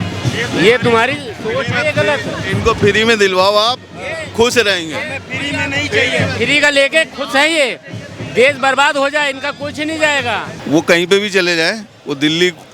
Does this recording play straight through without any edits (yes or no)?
no